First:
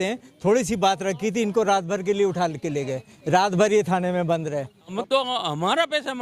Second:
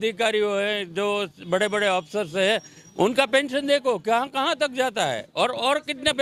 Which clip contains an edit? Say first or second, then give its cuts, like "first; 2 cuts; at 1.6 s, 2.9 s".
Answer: first; 1 cut; at 4.9 s